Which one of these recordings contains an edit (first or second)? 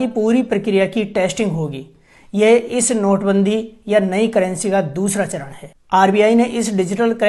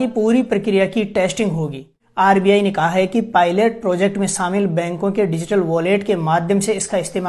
second